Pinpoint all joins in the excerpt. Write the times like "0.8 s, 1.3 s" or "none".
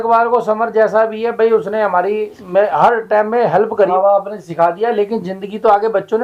3.9 s